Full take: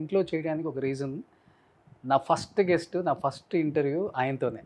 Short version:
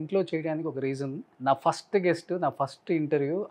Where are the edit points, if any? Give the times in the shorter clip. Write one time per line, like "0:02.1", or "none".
0:01.2